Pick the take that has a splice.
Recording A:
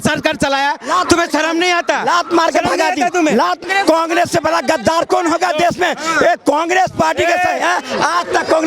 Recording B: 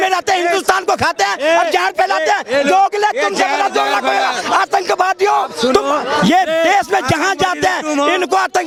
A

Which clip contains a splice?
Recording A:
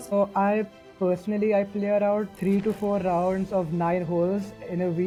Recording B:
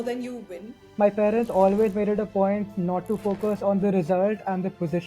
B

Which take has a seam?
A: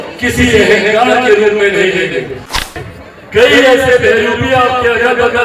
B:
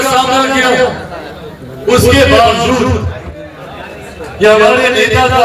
A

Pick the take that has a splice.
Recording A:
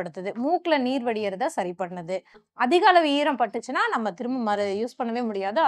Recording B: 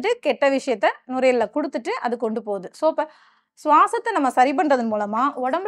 A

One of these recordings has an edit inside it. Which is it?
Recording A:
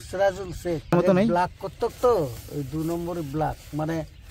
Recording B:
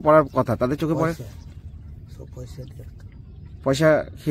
A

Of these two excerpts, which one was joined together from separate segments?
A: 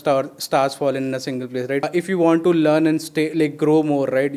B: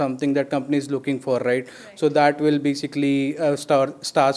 A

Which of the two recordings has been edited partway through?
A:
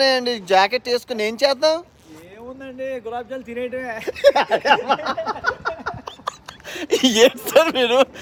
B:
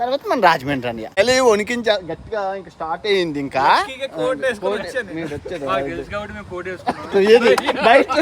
B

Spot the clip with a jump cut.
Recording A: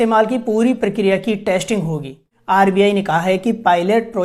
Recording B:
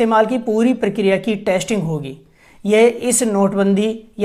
A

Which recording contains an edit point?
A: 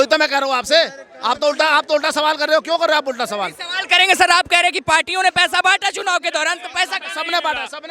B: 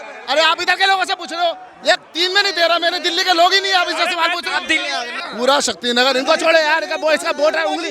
B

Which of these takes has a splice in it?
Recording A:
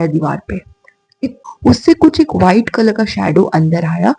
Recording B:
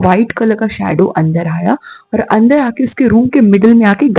A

